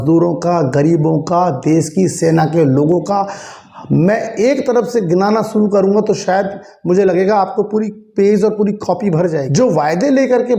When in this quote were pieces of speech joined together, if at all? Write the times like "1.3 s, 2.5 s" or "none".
9.4 s